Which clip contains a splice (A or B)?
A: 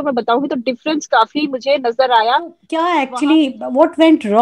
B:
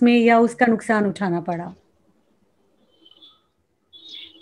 A